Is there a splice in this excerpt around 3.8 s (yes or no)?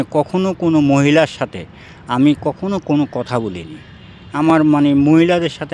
no